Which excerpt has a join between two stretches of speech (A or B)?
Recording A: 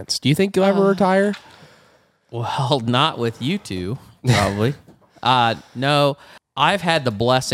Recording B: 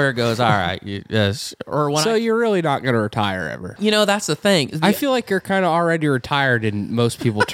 A